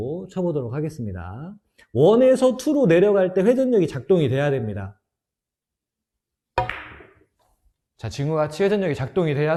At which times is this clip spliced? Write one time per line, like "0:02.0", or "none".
none